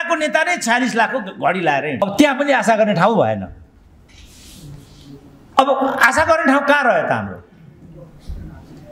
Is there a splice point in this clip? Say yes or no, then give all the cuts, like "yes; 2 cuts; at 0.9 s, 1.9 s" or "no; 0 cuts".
no; 0 cuts